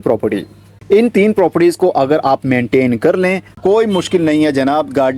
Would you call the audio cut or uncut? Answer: cut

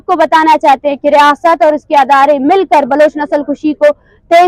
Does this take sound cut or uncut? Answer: uncut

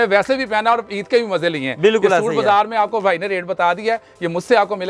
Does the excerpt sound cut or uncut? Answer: uncut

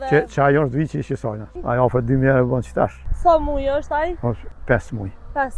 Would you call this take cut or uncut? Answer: cut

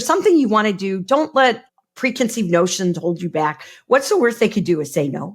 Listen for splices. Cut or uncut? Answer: cut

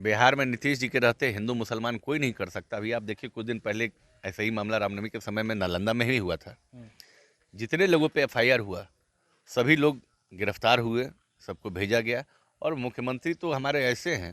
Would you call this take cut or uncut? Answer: uncut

